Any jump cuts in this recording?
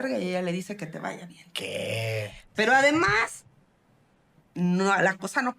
no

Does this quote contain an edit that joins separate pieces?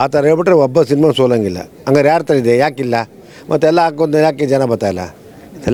no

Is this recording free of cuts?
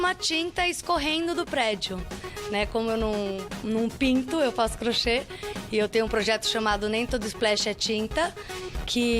yes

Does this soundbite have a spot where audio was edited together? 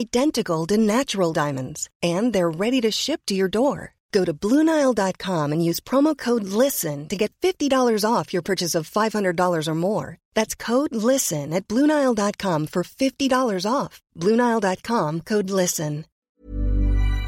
yes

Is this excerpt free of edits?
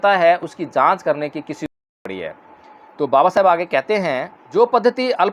yes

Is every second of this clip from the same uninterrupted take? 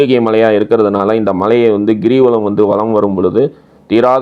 yes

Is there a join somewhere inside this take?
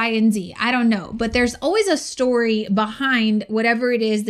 no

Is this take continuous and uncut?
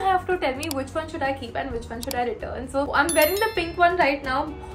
yes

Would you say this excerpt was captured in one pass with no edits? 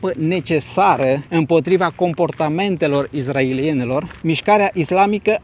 yes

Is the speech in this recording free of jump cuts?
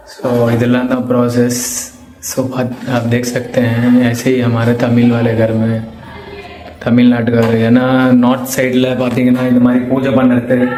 yes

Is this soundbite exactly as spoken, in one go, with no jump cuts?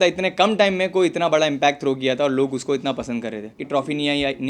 no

